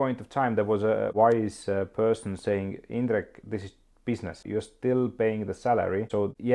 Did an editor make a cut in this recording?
yes; 1 cut; at 1.1 s

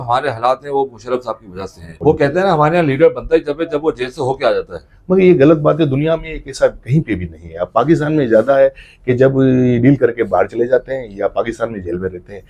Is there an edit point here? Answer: yes; 1 cut; at 1.8 s

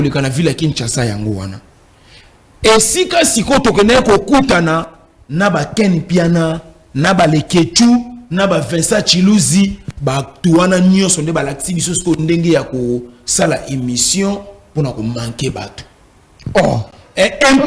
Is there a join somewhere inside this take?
no; 0 cuts

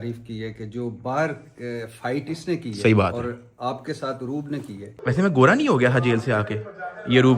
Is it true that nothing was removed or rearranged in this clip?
no; 1 cut; at 4.9 s

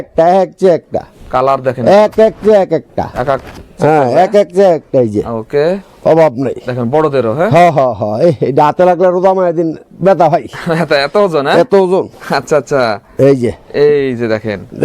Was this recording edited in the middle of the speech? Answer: no; 0 cuts

